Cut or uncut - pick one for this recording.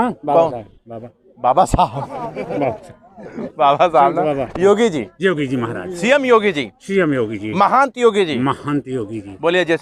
uncut